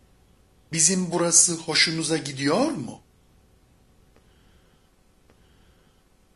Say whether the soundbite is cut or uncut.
uncut